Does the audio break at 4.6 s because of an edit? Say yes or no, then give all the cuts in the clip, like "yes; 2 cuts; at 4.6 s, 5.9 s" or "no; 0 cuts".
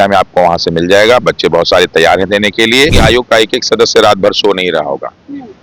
no; 1 cut; at 3.0 s